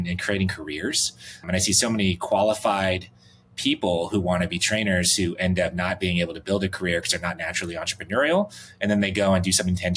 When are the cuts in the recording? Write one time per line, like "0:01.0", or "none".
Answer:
0:01.5

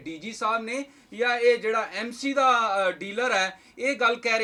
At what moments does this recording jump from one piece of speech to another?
none

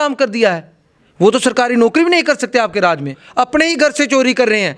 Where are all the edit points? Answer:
0:03.2

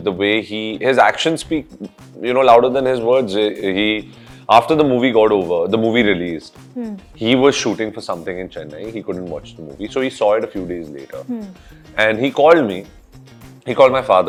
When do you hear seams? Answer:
none

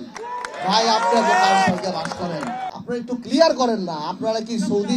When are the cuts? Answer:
0:02.7

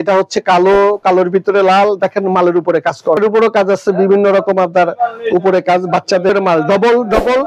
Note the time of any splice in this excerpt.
0:03.2
0:06.3

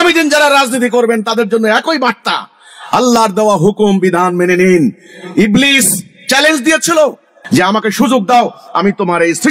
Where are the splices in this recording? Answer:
none

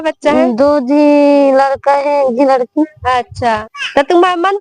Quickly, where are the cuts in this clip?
0:03.7

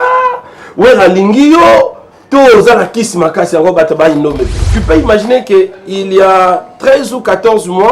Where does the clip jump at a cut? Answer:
0:04.7

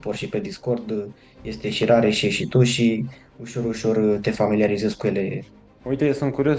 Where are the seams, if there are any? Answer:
0:05.5

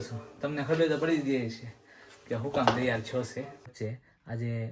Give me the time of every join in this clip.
0:03.7

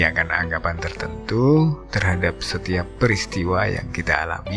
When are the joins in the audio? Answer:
none

